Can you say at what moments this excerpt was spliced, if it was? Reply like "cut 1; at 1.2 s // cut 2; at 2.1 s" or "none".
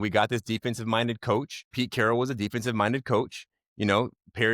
cut 1; at 1.6 s